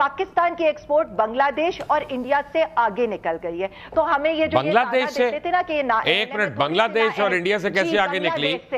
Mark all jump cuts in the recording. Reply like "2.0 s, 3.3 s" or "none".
none